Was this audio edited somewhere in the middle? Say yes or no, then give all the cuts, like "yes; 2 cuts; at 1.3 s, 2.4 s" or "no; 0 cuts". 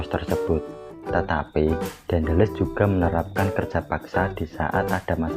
no; 0 cuts